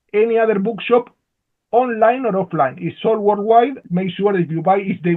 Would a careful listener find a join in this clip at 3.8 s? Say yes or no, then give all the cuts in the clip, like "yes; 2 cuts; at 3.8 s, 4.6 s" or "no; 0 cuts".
yes; 1 cut; at 3.8 s